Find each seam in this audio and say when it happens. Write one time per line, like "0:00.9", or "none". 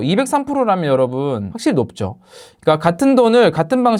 none